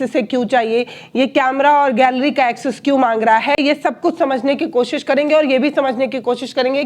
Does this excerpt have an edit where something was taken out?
no; 0 cuts

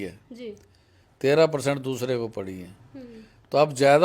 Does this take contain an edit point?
no; 0 cuts

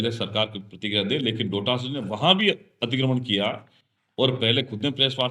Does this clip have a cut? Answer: no; 0 cuts

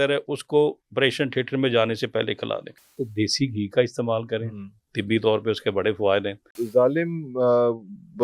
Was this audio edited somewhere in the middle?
yes; 2 cuts; at 2.8 s, 6.6 s

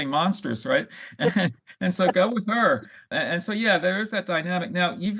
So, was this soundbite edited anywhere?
no; 0 cuts

